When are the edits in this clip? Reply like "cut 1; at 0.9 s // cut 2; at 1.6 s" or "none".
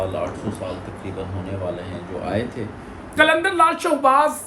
cut 1; at 3.1 s